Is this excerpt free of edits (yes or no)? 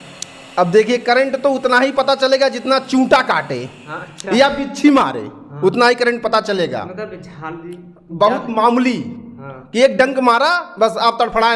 yes